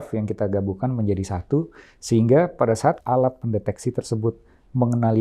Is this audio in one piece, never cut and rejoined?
no; 1 cut; at 3.0 s

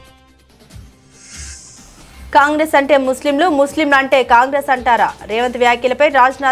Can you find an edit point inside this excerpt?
yes; 1 cut; at 2.3 s

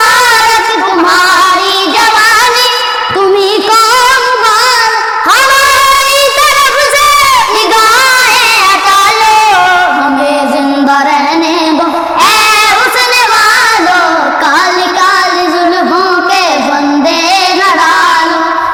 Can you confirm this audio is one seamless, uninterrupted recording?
yes; 0 cuts

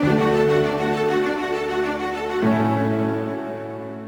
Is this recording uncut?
yes; 0 cuts

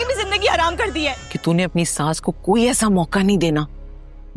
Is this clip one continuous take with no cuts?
no; 1 cut; at 1.3 s

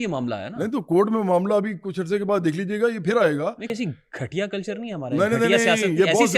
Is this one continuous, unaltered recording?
no; 1 cut; at 3.7 s

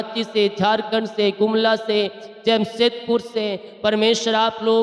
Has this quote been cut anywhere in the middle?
no; 0 cuts

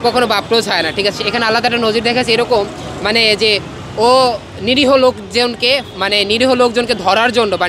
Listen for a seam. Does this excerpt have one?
no; 0 cuts

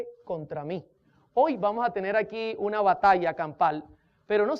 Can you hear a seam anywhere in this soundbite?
yes; 1 cut; at 3.0 s

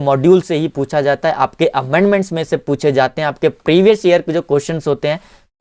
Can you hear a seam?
no; 0 cuts

